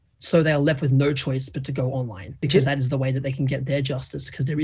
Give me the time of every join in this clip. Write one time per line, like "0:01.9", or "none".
0:02.4